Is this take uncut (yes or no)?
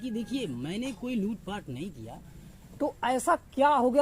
no